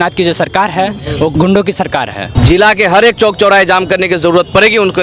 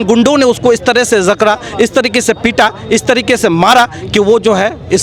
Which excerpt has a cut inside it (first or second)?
first